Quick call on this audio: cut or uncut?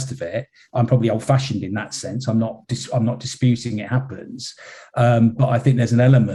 uncut